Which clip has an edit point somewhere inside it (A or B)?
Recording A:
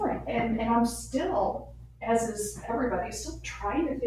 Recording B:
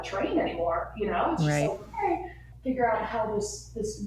B